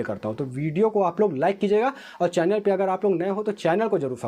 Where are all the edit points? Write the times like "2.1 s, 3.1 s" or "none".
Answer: none